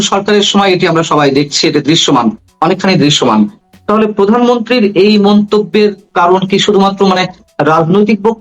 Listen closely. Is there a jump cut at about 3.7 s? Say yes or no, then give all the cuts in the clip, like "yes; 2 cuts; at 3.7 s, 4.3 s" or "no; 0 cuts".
yes; 1 cut; at 3.7 s